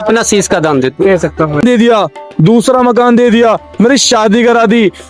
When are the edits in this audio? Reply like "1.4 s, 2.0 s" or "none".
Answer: 1.6 s